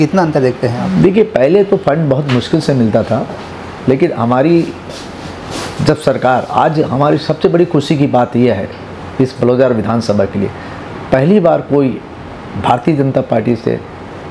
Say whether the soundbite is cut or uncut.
uncut